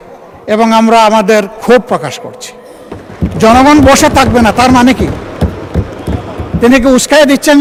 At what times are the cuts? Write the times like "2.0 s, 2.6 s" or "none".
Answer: none